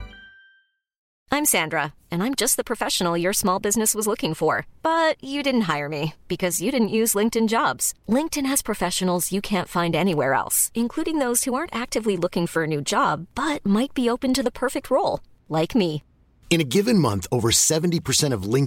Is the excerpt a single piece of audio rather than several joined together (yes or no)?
no